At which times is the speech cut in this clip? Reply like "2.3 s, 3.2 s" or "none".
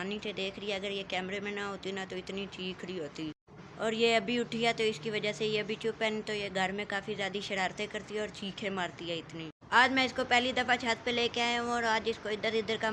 none